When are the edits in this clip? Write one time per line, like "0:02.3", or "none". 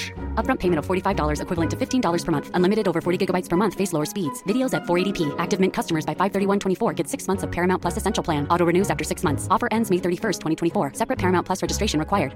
none